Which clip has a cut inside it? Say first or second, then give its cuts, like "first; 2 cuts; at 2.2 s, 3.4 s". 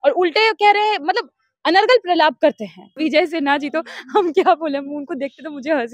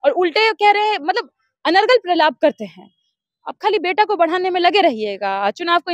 first; 1 cut; at 2.9 s